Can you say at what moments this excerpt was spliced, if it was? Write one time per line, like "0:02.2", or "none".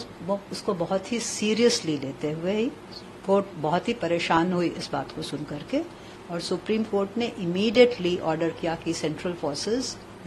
none

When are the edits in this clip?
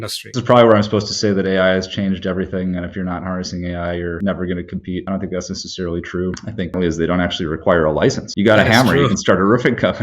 0:06.7

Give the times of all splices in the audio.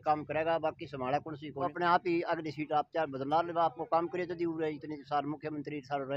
0:01.7

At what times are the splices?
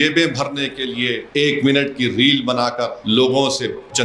0:01.2
0:03.0

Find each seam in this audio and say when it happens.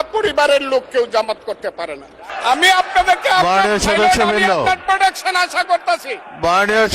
0:02.2

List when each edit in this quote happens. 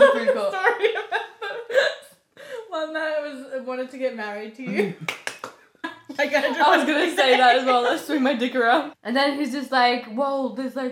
0:05.9
0:08.9

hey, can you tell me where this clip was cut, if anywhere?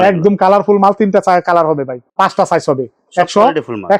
none

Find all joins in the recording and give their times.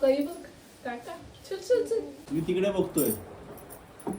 0:02.2

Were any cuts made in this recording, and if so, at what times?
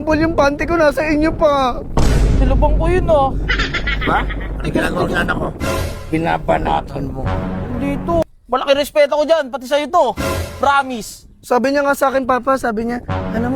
0:08.2

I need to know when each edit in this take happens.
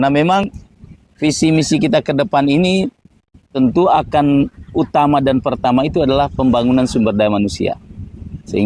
none

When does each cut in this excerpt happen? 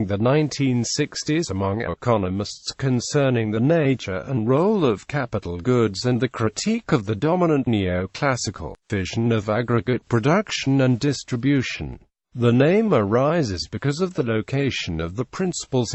0:08.8

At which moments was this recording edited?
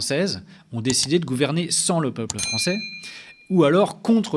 none

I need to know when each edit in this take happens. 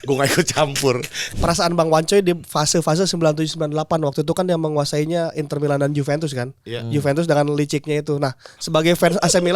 0:01.2

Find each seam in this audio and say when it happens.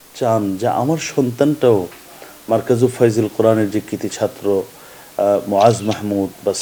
none

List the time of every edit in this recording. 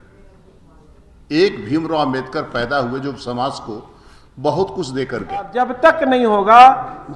0:05.5

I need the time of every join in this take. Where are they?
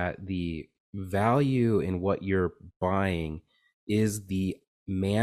none

